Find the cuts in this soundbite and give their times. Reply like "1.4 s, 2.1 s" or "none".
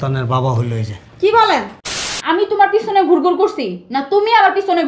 1.8 s